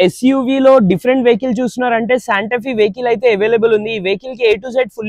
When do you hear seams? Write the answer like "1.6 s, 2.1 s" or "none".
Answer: none

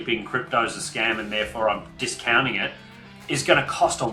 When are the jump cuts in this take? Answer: none

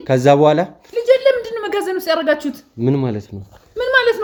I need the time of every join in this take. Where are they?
none

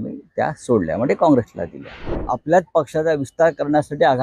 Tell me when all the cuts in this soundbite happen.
2.2 s

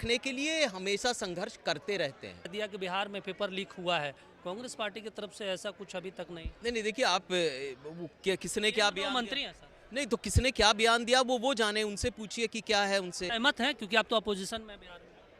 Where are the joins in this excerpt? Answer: 2.5 s, 13.3 s

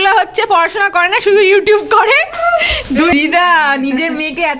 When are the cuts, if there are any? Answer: 3.1 s

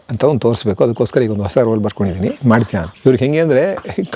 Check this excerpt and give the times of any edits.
2.8 s

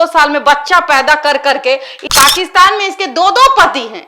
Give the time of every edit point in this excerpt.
2.0 s

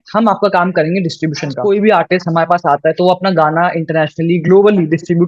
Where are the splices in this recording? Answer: 1.6 s

